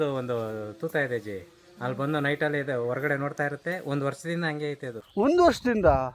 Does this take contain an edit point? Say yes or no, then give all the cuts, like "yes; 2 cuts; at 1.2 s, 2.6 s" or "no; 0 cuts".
yes; 1 cut; at 5.2 s